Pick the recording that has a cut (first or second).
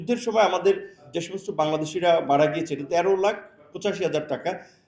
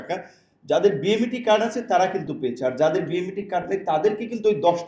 first